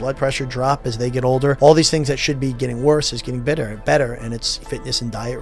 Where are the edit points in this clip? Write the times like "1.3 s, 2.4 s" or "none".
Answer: 1.6 s, 4.5 s